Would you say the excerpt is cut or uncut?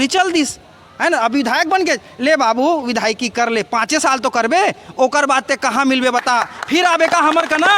uncut